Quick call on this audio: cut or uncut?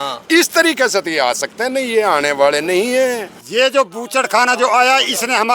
cut